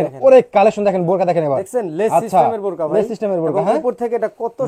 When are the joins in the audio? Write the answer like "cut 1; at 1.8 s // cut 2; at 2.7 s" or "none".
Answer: none